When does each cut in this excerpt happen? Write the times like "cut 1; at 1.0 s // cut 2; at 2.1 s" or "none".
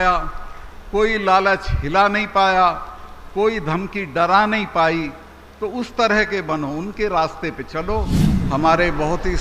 cut 1; at 8.2 s